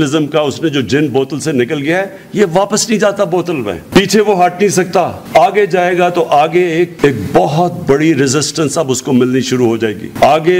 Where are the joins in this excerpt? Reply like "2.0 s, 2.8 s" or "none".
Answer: none